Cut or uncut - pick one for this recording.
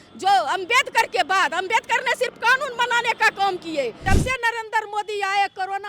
cut